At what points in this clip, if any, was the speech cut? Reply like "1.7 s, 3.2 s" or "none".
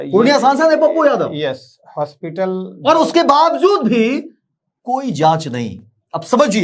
none